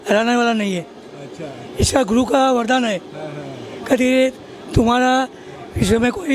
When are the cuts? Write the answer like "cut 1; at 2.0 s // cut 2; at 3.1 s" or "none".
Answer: none